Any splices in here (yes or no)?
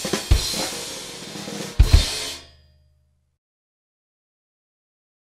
no